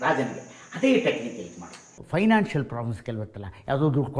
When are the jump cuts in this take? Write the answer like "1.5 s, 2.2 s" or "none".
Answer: 1.9 s